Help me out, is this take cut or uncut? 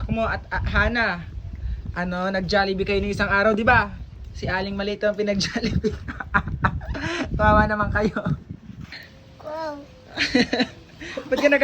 cut